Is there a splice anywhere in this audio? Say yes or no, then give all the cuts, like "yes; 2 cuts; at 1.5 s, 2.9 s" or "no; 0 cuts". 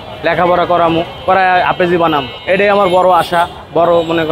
no; 0 cuts